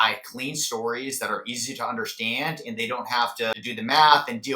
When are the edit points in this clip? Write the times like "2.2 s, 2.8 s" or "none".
3.7 s